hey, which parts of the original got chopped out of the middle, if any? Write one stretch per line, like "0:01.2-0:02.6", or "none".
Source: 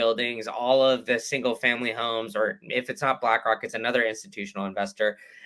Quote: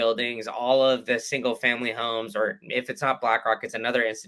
none